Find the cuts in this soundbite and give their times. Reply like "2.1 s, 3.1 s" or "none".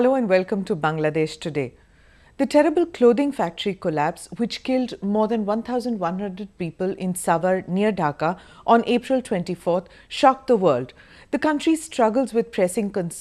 none